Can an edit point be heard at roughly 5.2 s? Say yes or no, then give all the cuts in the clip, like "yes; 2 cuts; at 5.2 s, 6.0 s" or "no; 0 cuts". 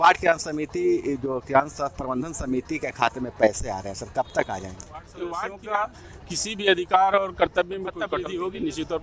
yes; 2 cuts; at 5.2 s, 7.9 s